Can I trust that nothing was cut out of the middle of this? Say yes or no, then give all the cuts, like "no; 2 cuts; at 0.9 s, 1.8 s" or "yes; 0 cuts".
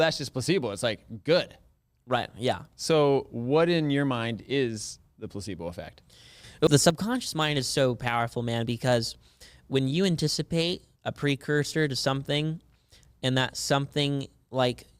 no; 1 cut; at 6.7 s